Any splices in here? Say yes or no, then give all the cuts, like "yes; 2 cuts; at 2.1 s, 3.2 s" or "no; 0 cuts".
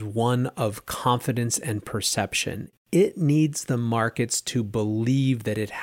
yes; 1 cut; at 2.7 s